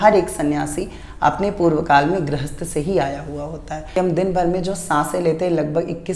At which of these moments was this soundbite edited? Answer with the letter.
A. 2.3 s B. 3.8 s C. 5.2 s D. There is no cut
B